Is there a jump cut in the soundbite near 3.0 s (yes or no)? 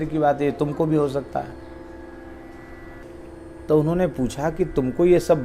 yes